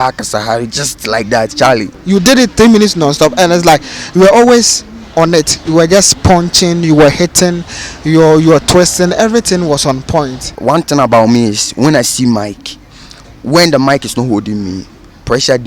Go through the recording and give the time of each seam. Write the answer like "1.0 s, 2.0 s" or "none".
1.9 s, 10.5 s